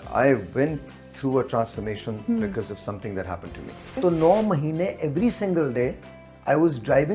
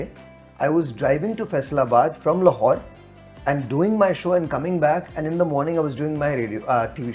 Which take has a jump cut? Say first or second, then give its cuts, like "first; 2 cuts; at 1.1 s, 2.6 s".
first; 1 cut; at 4.0 s